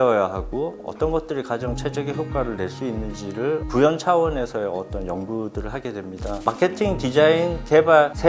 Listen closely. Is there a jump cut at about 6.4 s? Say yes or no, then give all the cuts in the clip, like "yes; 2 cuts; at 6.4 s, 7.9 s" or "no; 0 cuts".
yes; 1 cut; at 6.4 s